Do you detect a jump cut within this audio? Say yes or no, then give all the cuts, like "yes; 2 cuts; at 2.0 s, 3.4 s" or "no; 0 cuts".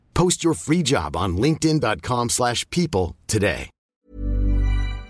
yes; 1 cut; at 3.9 s